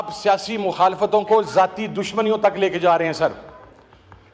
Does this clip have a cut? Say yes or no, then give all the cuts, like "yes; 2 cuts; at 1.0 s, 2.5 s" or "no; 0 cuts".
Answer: no; 0 cuts